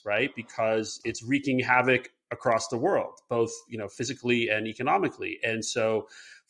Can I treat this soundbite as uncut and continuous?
no; 1 cut; at 0.9 s

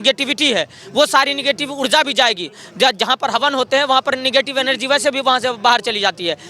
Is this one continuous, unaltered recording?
yes; 0 cuts

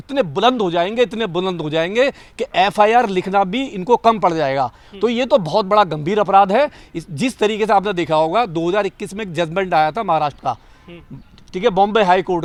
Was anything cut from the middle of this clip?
no; 0 cuts

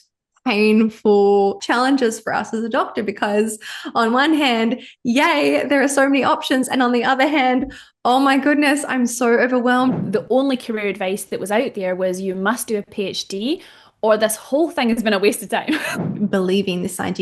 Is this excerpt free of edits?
no; 3 cuts; at 1.6 s, 10.0 s, 16.0 s

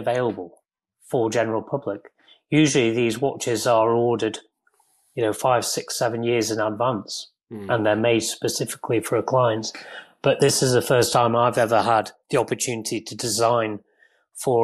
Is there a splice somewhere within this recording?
no; 0 cuts

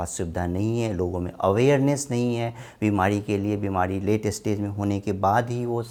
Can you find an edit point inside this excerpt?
no; 0 cuts

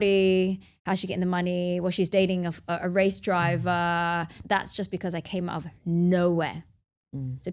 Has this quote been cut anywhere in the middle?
yes; 1 cut; at 4.4 s

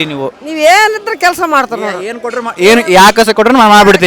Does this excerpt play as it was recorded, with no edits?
yes; 0 cuts

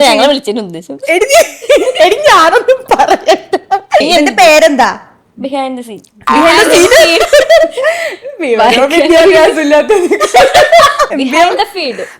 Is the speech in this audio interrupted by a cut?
yes; 2 cuts; at 4.0 s, 11.1 s

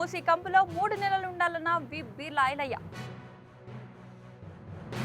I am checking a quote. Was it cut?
no; 0 cuts

